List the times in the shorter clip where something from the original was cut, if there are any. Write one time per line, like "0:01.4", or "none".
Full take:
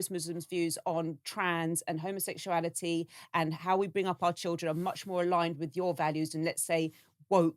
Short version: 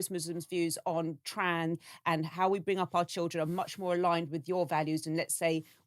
0:01.8